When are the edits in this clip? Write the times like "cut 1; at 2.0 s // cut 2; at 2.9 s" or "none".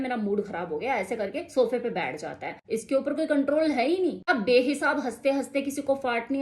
cut 1; at 2.5 s

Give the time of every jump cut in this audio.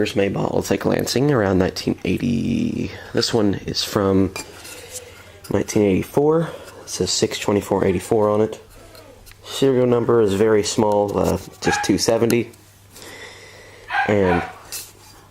cut 1; at 10.8 s

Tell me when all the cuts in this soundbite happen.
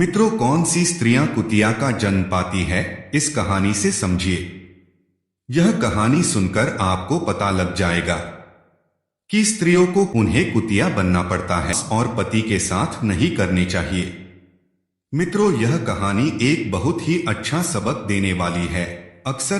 cut 1; at 10.1 s // cut 2; at 11.8 s

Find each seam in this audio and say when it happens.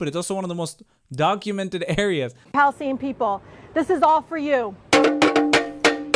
cut 1; at 2.4 s

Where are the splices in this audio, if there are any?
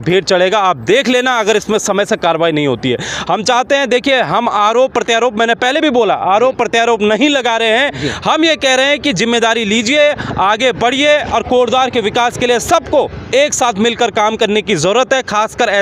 none

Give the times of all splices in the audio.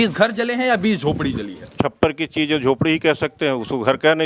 cut 1; at 1.8 s

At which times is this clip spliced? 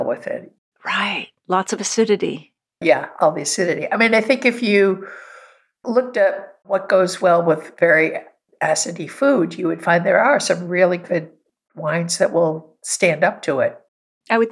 none

